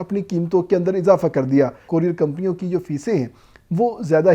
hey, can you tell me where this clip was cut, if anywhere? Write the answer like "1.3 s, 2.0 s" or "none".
1.8 s